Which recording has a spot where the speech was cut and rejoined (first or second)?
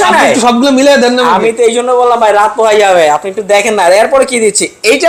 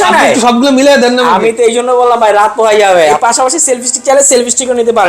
second